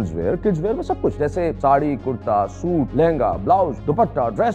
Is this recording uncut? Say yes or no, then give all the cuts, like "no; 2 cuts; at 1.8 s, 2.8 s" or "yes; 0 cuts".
no; 3 cuts; at 1.3 s, 2.9 s, 3.8 s